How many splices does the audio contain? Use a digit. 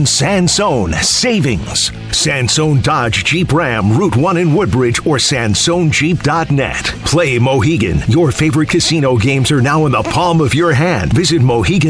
0